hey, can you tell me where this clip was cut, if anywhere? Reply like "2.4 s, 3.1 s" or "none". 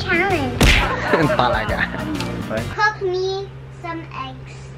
2.4 s